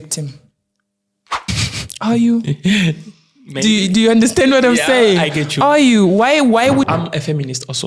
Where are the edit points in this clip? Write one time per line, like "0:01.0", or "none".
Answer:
0:01.5
0:06.9